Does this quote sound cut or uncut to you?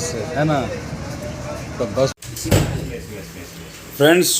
cut